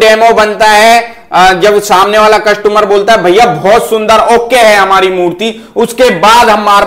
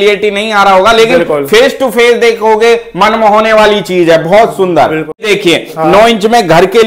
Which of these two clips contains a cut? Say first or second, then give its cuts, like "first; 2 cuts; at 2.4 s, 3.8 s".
second; 1 cut; at 5.2 s